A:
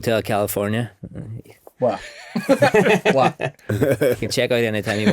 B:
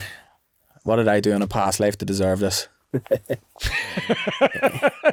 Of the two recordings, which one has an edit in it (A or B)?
A